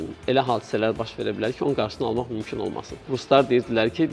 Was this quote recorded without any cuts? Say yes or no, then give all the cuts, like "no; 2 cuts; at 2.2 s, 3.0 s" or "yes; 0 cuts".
no; 1 cut; at 3.1 s